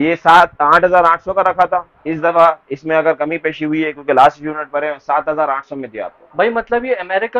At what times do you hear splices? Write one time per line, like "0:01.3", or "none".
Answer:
none